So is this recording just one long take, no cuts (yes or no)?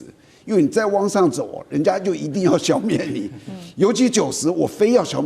yes